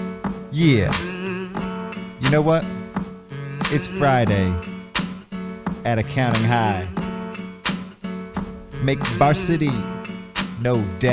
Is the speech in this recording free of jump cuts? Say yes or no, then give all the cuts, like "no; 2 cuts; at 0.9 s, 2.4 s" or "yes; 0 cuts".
yes; 0 cuts